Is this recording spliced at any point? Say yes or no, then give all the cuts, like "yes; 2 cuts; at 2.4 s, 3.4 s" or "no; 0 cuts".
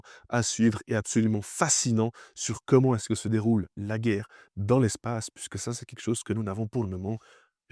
no; 0 cuts